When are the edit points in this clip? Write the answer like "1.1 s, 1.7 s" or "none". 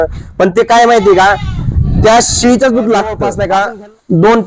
3.3 s